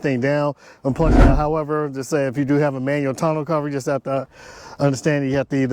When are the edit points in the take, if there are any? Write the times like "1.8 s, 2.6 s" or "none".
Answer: 1.2 s